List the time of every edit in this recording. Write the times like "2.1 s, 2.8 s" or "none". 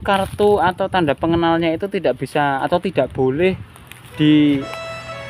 none